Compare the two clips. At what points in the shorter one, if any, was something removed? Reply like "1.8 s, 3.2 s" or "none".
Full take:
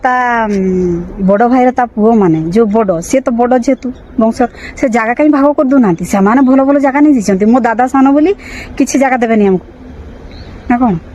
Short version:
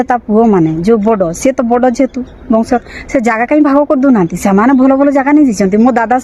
none